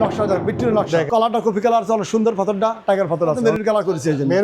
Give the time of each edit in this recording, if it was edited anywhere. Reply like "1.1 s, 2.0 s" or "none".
1.1 s, 3.4 s